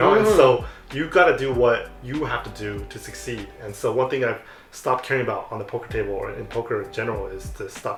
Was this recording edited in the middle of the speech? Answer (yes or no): no